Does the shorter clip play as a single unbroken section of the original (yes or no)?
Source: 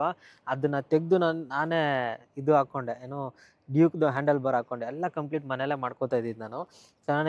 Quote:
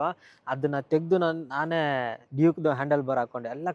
no